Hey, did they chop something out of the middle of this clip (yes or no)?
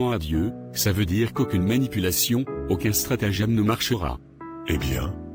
no